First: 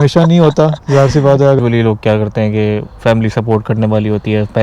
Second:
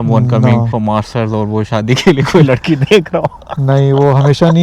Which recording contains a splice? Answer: first; 1 cut; at 1.6 s

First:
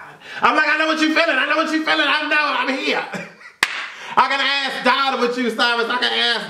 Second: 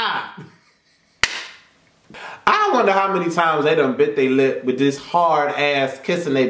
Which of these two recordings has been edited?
second; 1 cut; at 2.2 s

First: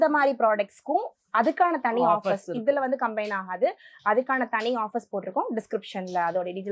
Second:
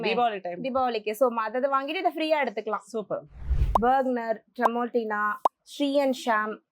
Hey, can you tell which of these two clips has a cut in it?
second; 1 cut; at 3.8 s

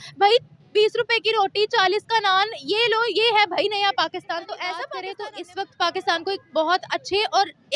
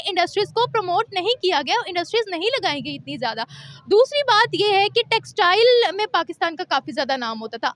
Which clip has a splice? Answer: first; 1 cut; at 4.8 s

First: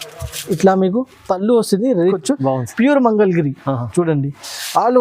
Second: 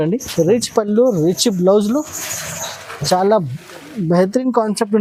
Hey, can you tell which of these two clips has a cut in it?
first; 1 cut; at 2.2 s

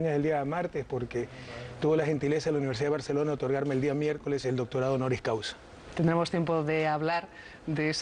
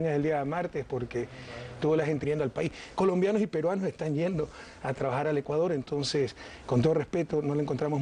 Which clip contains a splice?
first; 1 cut; at 2.2 s

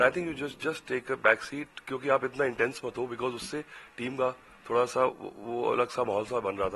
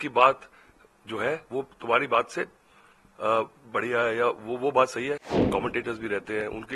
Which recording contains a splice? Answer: second; 1 cut; at 5.3 s

